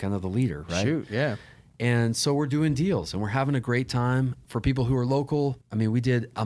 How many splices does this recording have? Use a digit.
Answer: 2